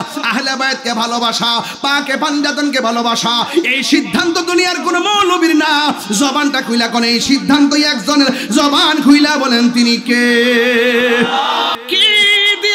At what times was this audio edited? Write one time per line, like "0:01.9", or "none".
0:11.8